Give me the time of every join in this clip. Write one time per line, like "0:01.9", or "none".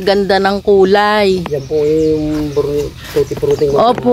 none

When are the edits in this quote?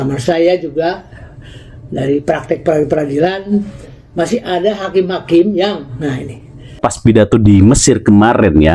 0:06.8

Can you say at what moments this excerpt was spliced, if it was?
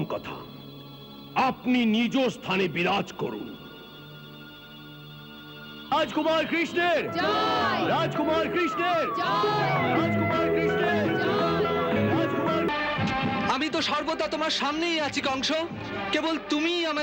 0:12.7

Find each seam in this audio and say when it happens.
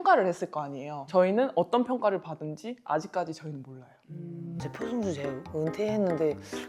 0:04.5

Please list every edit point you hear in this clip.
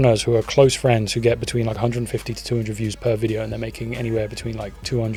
none

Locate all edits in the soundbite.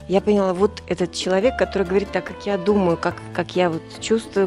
none

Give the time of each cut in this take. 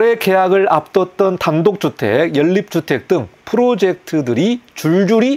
none

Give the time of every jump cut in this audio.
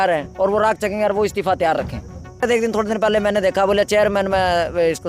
0:02.4

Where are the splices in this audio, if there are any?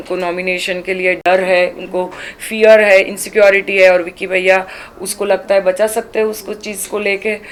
none

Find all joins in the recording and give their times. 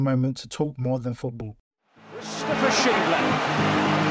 0:01.9

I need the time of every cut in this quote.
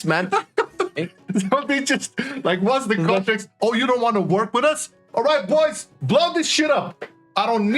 0:01.0

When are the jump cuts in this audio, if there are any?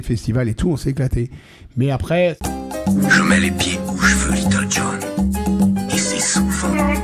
0:02.4

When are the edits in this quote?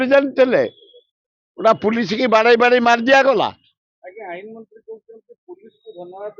none

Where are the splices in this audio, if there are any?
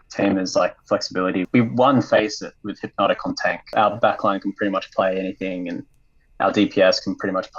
0:01.5
0:03.6

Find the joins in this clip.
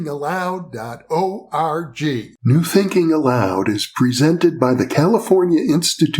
0:02.3

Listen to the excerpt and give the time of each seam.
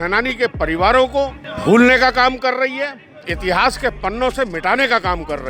0:01.4

